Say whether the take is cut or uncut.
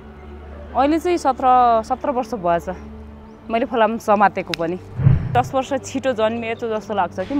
cut